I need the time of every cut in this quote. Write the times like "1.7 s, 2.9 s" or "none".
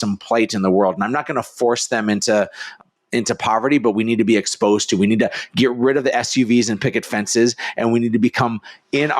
2.8 s